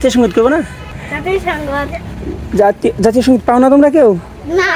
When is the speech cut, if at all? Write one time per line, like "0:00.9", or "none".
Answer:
0:01.0